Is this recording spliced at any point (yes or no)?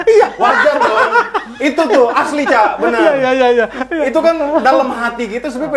no